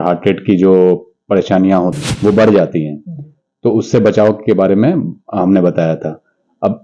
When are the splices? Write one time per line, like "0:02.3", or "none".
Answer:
0:01.9

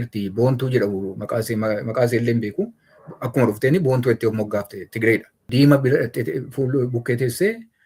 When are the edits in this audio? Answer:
0:05.4

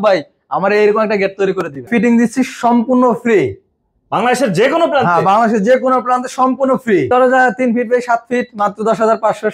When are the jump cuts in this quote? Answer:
0:01.9
0:07.1

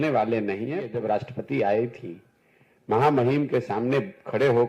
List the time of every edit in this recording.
0:00.9

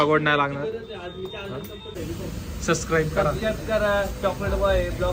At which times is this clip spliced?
0:01.9

